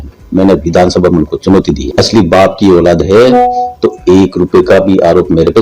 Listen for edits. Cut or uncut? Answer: cut